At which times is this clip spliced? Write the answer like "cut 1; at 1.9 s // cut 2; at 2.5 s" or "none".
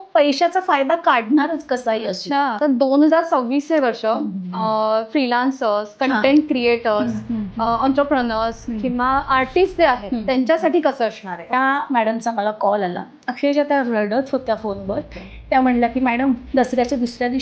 cut 1; at 2.5 s // cut 2; at 11.5 s